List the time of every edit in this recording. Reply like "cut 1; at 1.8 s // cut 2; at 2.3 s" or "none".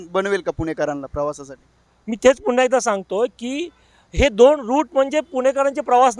none